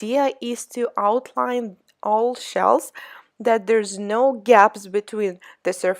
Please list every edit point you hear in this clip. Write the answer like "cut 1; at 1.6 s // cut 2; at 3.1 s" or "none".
cut 1; at 4.4 s